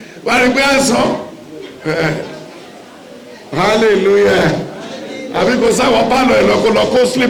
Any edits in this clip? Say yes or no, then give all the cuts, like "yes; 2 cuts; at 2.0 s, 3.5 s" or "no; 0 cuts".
no; 0 cuts